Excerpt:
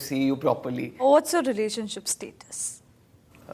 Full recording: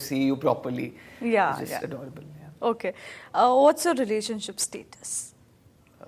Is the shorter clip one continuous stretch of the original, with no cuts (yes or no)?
no